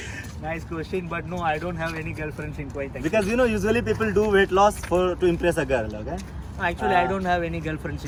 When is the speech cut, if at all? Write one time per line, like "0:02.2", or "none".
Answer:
none